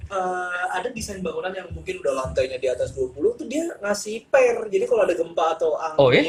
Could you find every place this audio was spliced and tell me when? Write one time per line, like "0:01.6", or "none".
none